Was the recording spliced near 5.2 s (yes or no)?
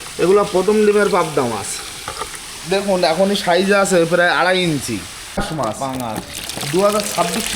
yes